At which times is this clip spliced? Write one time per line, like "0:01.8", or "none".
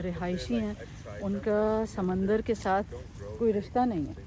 none